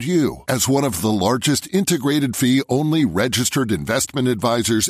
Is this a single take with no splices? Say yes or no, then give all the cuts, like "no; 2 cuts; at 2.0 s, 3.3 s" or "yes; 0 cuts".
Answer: yes; 0 cuts